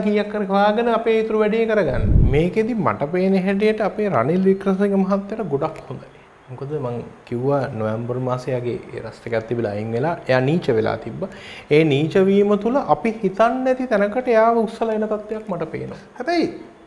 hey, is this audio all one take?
no; 1 cut; at 2.1 s

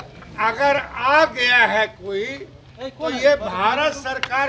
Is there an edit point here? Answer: no; 0 cuts

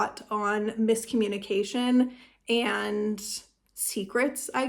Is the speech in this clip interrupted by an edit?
no; 0 cuts

